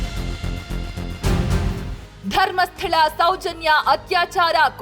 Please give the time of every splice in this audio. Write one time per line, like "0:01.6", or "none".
none